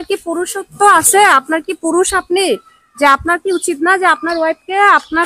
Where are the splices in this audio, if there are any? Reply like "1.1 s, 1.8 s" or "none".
none